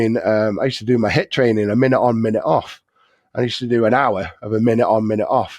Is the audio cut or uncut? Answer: uncut